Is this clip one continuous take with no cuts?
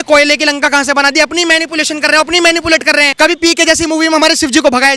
no; 1 cut; at 3.1 s

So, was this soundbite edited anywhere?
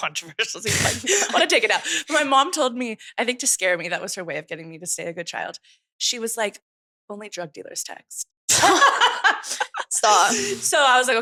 no; 0 cuts

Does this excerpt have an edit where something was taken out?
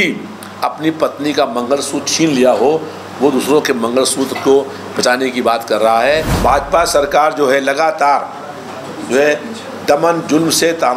yes; 1 cut; at 6.3 s

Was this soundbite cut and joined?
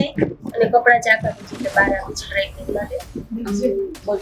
yes; 1 cut; at 3.2 s

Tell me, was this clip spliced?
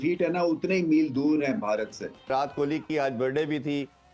yes; 1 cut; at 2.3 s

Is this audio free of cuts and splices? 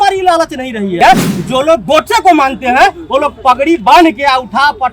no; 1 cut; at 1.0 s

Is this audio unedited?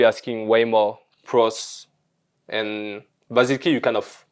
yes; 0 cuts

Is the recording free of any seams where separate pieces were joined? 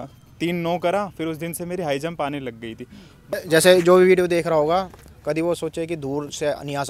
no; 1 cut; at 3.3 s

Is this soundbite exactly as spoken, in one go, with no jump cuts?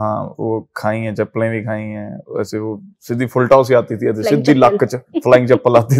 yes; 0 cuts

